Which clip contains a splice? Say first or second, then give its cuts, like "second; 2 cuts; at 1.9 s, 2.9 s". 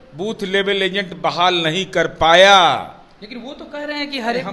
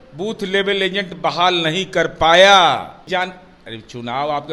second; 1 cut; at 3.0 s